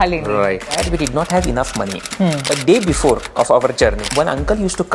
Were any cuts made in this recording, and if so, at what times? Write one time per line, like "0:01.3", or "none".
0:00.8
0:02.5
0:04.0